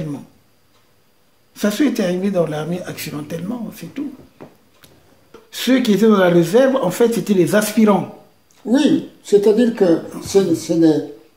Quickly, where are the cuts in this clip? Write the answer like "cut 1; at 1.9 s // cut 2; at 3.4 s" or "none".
cut 1; at 5.3 s